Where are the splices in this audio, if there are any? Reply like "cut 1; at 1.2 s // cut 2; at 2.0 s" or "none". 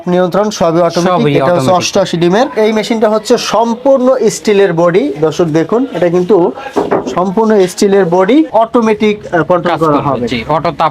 cut 1; at 2.5 s // cut 2; at 8.5 s